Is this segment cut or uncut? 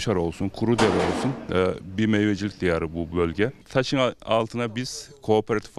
cut